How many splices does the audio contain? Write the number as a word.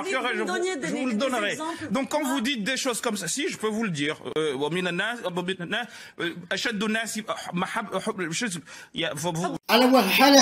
zero